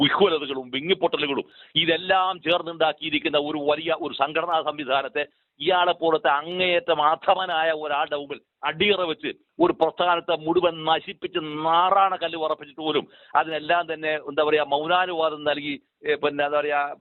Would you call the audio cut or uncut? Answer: uncut